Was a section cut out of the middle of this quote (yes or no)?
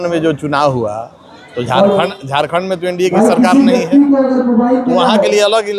no